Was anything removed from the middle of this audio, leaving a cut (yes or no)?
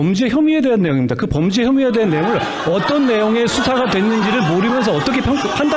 no